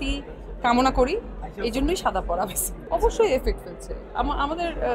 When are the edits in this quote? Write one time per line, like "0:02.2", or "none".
0:02.7